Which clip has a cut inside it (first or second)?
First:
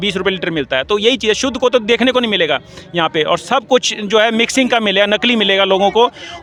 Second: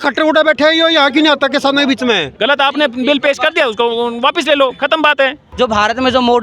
second